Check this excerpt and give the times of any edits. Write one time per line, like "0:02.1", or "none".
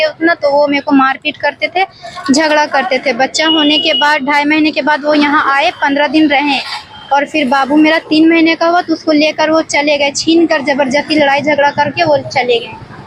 none